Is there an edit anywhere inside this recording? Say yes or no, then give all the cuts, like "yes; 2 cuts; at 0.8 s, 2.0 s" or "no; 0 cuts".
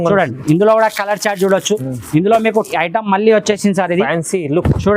yes; 1 cut; at 2.7 s